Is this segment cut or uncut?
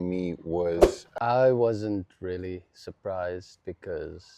cut